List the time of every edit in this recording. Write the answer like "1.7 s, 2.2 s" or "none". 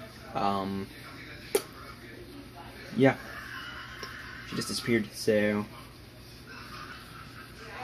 6.9 s